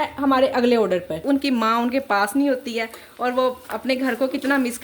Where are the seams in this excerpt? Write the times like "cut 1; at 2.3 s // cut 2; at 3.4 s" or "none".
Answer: cut 1; at 1.2 s